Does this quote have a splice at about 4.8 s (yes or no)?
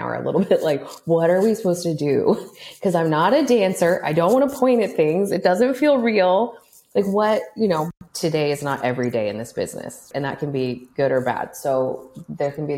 no